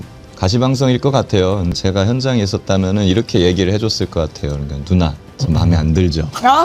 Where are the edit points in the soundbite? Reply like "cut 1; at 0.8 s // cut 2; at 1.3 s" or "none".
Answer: cut 1; at 1.8 s